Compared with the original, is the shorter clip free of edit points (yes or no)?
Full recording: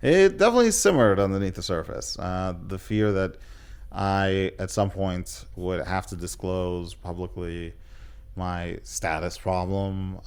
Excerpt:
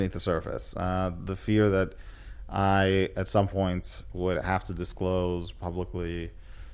yes